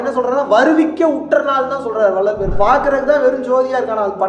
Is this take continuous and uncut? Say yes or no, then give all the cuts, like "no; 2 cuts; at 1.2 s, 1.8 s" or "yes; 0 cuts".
no; 1 cut; at 2.5 s